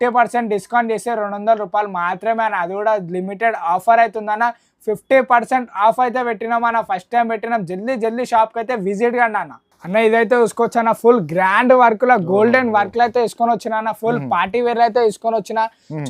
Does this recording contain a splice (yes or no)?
no